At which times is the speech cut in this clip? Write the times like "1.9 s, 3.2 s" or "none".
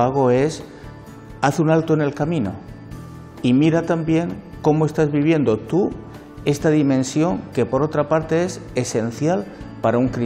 none